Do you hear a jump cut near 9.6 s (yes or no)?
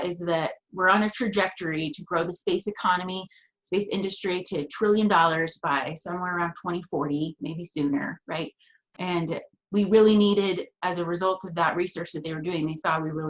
yes